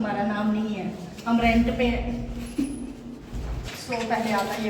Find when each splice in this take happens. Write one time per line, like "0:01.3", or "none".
none

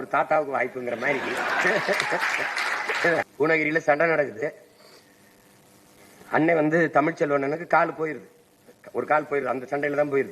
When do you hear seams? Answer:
0:03.3

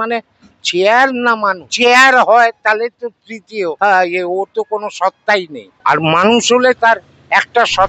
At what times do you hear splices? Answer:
0:01.7
0:03.8
0:05.6

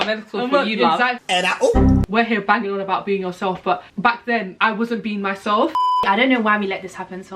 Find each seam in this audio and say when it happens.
0:02.1
0:04.2
0:05.8

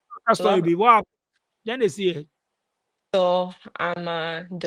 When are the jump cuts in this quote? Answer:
none

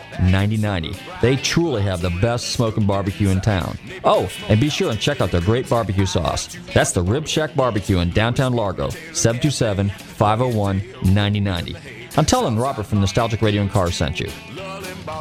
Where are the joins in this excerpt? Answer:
none

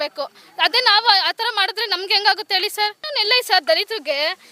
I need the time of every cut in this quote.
0:03.1

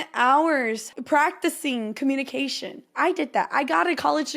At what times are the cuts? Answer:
0:00.9

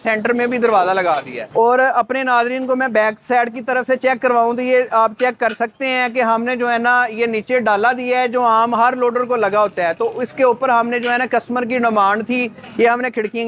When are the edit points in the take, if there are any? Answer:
none

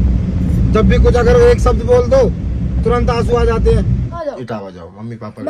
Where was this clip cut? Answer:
0:04.1

